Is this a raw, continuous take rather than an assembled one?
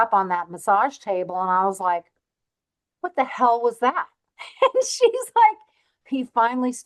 yes; 0 cuts

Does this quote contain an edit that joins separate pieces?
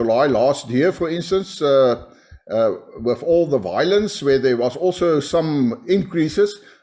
no; 0 cuts

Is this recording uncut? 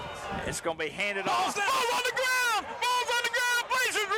yes; 0 cuts

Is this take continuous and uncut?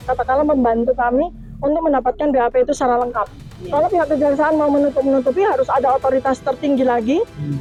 yes; 0 cuts

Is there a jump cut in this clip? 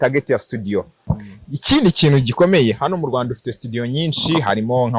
yes; 1 cut; at 1.1 s

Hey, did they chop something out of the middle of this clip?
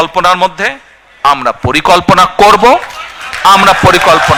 no; 0 cuts

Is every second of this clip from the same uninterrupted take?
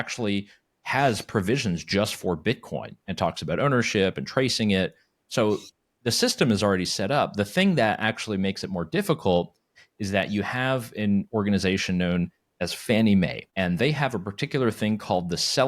no; 1 cut; at 13.4 s

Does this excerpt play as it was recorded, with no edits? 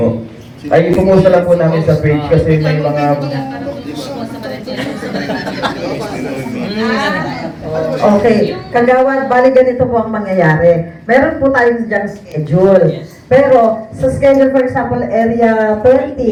yes; 0 cuts

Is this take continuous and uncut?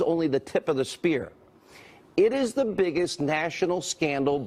no; 1 cut; at 1.3 s

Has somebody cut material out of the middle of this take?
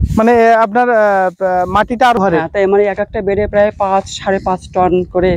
yes; 1 cut; at 2.2 s

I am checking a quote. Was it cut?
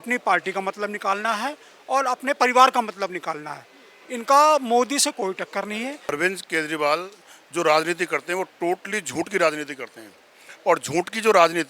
yes; 1 cut; at 6.1 s

